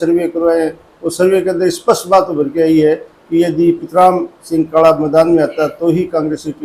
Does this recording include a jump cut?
no; 0 cuts

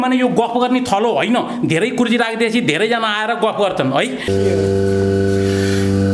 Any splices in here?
yes; 1 cut; at 4.2 s

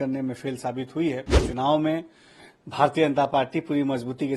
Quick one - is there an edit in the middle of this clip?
yes; 1 cut; at 1.4 s

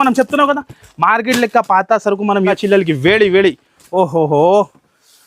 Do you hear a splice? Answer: yes; 1 cut; at 2.5 s

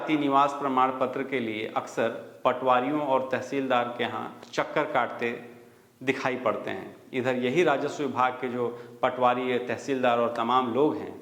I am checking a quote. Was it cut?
no; 0 cuts

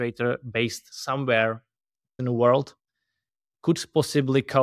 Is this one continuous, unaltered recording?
no; 1 cut; at 2.2 s

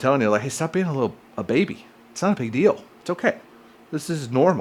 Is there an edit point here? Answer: no; 0 cuts

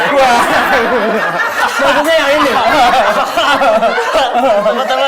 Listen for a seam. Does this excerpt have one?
no; 0 cuts

